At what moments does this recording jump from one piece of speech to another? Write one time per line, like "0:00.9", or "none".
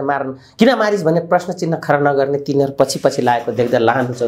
none